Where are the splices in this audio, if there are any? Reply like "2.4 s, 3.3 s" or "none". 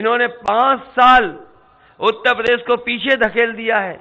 none

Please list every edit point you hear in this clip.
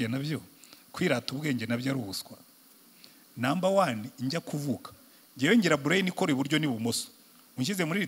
none

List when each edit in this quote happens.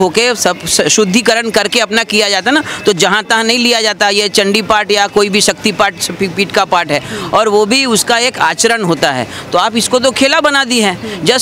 none

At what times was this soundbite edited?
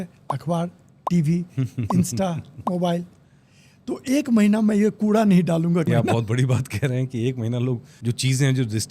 5.9 s, 7.9 s

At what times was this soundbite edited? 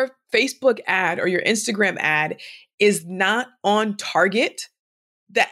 none

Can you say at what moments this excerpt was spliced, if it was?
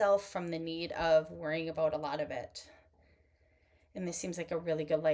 none

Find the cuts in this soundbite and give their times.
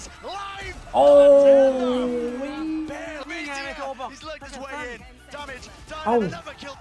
3.2 s

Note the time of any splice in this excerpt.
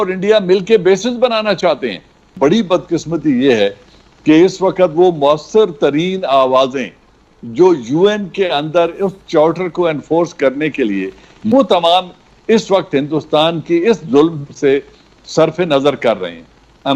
2.3 s, 11.5 s

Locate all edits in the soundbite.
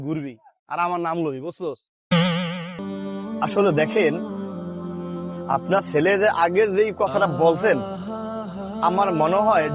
2.8 s

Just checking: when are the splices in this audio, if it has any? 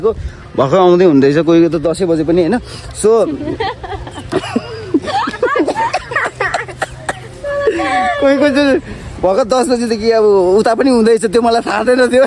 none

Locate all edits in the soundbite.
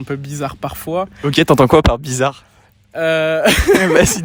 none

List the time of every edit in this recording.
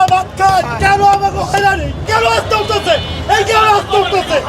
none

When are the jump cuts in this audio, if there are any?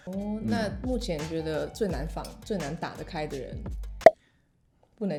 none

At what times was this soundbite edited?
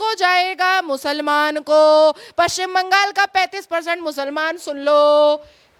none

